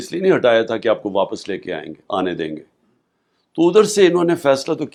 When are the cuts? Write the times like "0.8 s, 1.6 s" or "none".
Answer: none